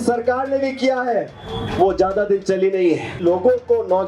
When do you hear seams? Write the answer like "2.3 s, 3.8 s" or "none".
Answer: 3.2 s